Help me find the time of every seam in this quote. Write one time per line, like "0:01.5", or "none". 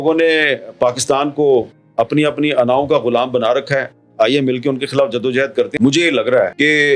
0:05.7